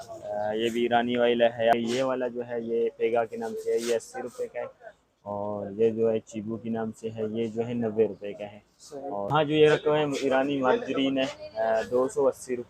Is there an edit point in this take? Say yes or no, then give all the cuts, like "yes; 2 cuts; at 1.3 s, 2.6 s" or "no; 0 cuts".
yes; 2 cuts; at 1.7 s, 9.3 s